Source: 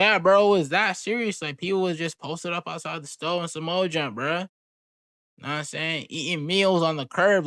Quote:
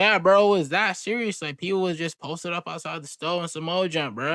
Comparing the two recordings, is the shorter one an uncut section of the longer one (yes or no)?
yes